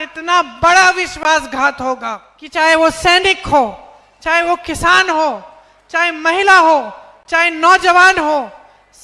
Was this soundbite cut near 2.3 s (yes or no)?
yes